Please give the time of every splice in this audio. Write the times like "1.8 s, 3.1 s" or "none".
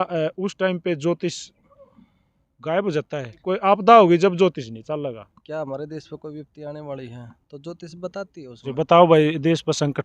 3.5 s, 5.3 s, 8.7 s